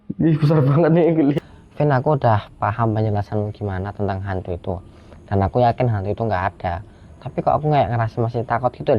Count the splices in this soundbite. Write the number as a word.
one